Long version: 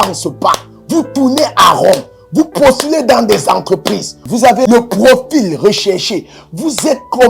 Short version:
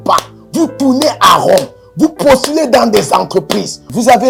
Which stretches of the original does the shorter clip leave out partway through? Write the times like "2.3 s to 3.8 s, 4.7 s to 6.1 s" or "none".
none